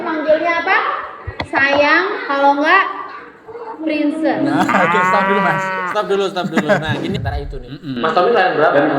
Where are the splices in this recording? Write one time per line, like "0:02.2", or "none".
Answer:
0:07.2